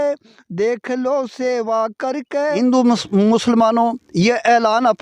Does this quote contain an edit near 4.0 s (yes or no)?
no